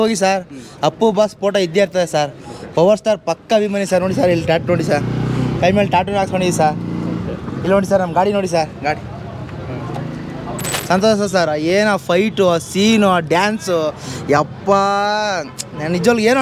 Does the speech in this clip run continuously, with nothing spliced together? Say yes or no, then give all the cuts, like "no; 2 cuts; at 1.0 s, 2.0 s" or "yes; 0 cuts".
no; 1 cut; at 10.7 s